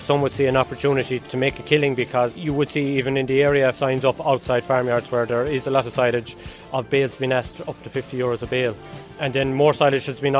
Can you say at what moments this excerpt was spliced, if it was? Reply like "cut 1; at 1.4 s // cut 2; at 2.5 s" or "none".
cut 1; at 1.2 s // cut 2; at 3.8 s